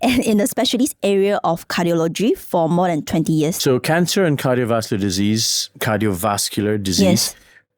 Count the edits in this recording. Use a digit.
1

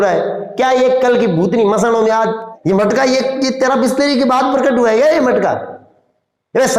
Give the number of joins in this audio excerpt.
1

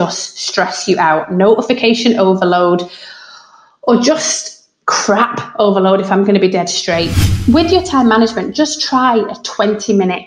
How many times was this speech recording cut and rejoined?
1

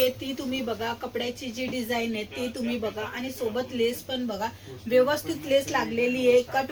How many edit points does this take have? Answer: 0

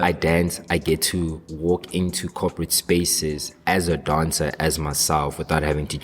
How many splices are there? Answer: 1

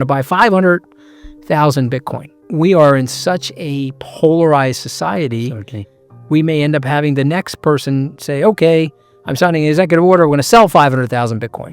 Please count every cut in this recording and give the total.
1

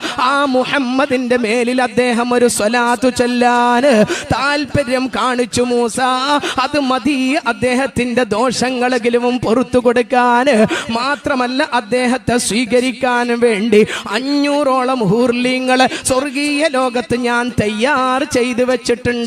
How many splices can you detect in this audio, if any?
0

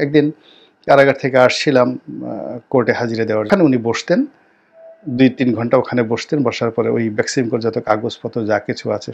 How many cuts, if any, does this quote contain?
1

